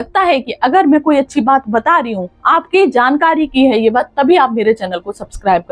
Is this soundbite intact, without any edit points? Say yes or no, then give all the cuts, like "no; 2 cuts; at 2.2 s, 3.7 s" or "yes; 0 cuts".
yes; 0 cuts